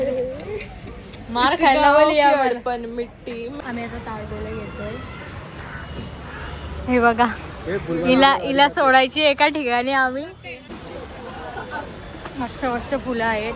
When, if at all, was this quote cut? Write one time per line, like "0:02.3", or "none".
0:03.6
0:10.7